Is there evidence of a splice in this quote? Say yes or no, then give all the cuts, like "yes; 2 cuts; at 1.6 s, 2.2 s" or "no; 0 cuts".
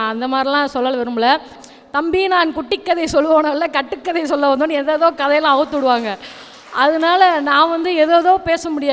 yes; 1 cut; at 1.6 s